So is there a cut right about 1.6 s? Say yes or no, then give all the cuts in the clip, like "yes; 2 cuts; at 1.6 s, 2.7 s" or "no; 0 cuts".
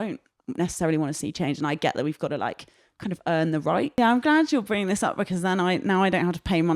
no; 1 cut; at 4.0 s